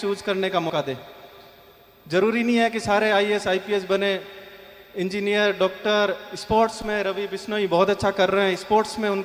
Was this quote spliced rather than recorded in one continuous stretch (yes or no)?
no